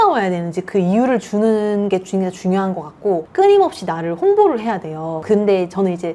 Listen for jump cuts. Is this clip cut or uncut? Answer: uncut